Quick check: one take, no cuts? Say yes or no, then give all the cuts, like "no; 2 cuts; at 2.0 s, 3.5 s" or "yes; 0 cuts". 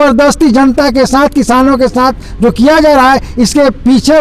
yes; 0 cuts